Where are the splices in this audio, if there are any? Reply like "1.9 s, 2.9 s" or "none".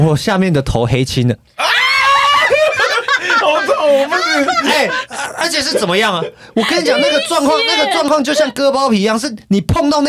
2.9 s, 5.0 s